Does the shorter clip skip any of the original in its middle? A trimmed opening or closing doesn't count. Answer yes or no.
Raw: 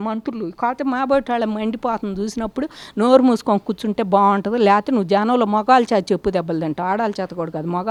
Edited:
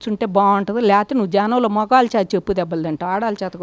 no